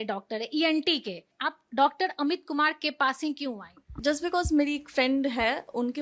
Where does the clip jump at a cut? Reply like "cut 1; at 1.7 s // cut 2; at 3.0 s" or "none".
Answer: cut 1; at 1.3 s